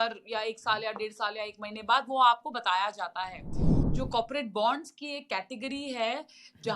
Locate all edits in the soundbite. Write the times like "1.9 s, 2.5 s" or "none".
3.8 s